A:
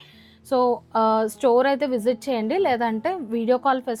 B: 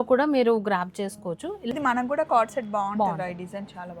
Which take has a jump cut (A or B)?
B